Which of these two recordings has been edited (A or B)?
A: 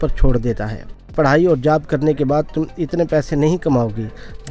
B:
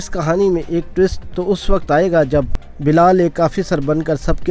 A